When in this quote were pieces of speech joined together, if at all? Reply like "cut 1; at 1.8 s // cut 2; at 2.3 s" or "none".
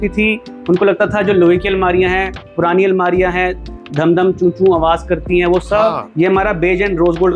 cut 1; at 6.1 s